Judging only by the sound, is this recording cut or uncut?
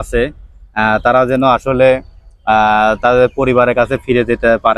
uncut